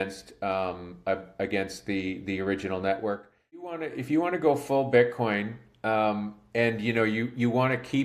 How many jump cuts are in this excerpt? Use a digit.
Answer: 1